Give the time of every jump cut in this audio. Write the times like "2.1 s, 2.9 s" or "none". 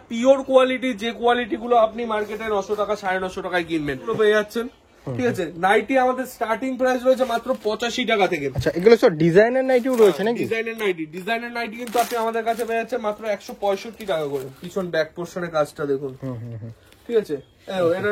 4.1 s, 14.6 s